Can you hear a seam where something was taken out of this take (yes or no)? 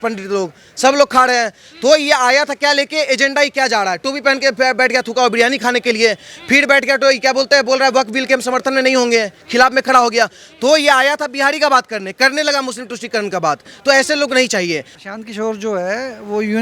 yes